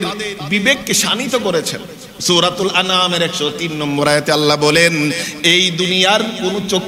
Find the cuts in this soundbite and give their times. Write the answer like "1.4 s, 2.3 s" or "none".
2.1 s